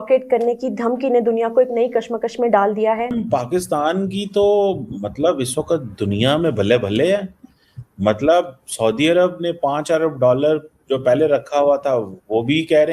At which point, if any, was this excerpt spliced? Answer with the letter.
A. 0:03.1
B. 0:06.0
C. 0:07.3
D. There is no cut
A